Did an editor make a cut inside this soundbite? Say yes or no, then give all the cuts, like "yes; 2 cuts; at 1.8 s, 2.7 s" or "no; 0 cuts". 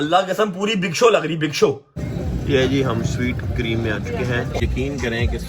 yes; 2 cuts; at 2.1 s, 4.6 s